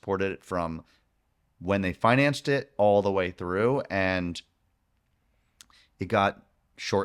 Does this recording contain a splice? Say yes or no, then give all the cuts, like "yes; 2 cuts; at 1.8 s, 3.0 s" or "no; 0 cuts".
no; 0 cuts